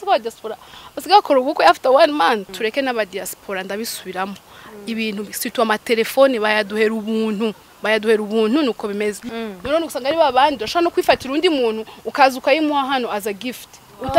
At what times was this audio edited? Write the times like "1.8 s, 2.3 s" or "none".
2.5 s, 9.2 s